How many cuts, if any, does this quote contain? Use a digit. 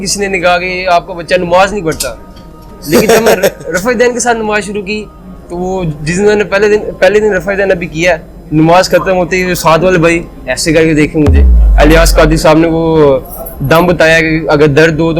1